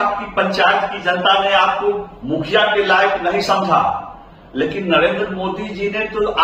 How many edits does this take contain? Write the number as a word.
zero